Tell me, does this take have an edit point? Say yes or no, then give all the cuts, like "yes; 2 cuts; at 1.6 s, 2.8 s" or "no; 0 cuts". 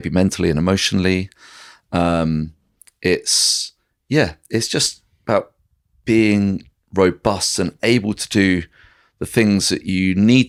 no; 0 cuts